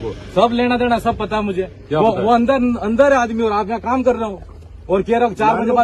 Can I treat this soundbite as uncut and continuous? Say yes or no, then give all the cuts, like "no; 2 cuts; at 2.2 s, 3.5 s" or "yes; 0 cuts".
yes; 0 cuts